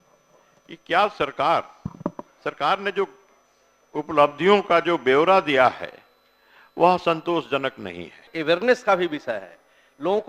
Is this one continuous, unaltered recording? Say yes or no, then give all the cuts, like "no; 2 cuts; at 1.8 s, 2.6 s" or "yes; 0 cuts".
no; 1 cut; at 8.3 s